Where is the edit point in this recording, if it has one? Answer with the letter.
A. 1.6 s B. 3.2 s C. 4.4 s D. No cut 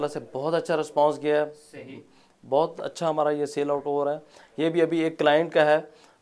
D